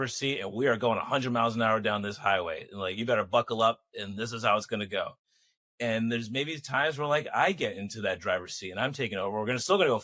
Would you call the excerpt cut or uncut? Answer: uncut